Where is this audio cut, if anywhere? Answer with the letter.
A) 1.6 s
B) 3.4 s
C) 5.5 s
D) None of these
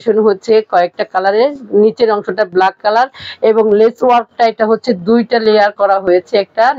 D